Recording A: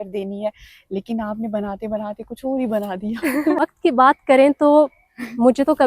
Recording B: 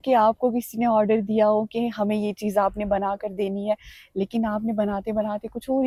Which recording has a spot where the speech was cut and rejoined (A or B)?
A